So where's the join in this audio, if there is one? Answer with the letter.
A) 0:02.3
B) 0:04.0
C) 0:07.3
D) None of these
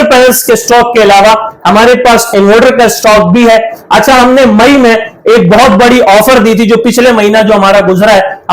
D